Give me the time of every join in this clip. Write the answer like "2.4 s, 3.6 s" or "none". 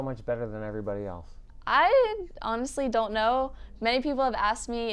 none